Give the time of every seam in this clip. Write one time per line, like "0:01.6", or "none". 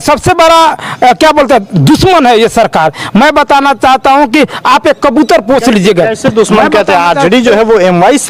none

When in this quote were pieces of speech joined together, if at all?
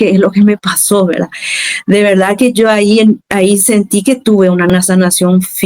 0:04.7

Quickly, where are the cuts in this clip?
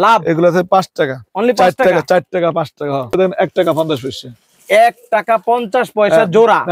0:03.2

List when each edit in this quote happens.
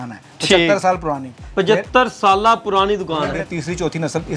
0:03.4

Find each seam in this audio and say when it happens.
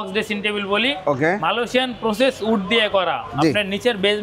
none

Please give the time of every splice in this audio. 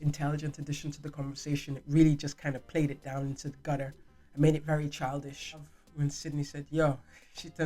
0:05.8

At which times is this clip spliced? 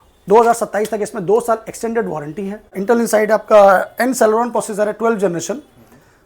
0:02.8

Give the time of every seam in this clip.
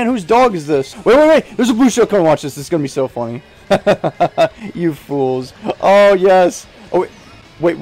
0:00.9

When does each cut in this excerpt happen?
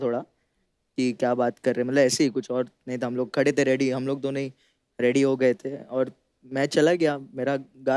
none

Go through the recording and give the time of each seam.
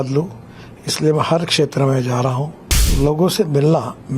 0:02.8

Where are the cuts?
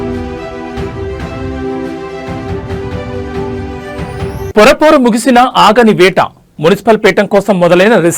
0:04.0

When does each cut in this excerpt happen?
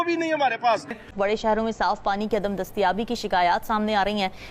0:01.1

